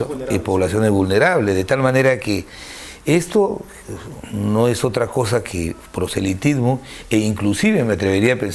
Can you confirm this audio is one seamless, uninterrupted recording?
yes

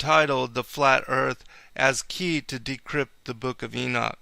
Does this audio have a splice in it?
yes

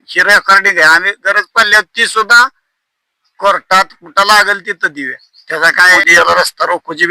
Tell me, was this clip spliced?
yes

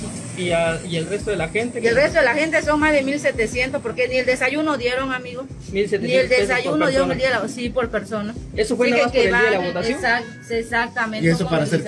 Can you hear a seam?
no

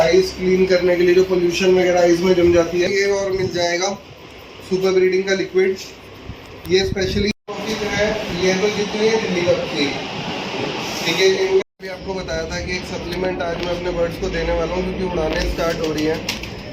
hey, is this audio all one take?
no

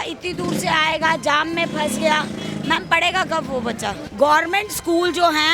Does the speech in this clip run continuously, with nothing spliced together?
no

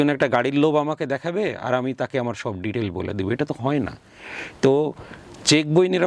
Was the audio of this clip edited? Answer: no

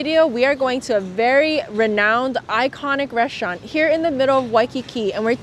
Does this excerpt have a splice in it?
no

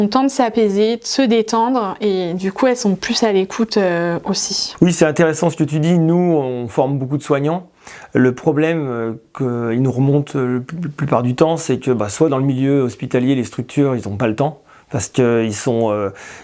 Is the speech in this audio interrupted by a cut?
no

